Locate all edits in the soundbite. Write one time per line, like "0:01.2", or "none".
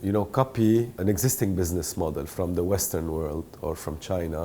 0:01.0